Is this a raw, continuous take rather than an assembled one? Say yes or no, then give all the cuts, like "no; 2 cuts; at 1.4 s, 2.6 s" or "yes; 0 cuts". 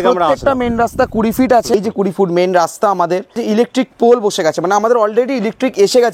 no; 2 cuts; at 1.7 s, 3.4 s